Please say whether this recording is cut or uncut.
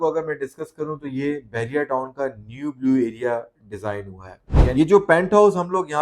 cut